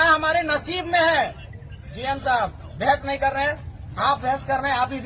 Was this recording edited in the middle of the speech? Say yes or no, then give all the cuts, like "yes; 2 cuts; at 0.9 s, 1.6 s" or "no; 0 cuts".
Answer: no; 0 cuts